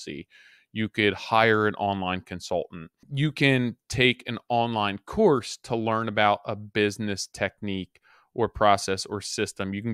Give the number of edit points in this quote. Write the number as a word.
one